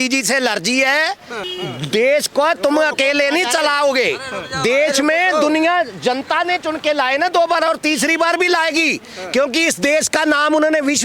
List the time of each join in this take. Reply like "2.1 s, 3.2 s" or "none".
1.4 s